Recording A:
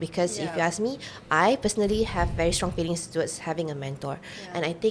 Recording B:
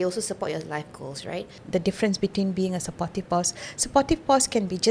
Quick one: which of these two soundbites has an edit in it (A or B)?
B